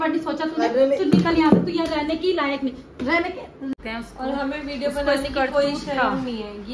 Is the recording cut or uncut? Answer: cut